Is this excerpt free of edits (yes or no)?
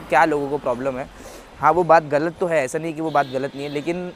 yes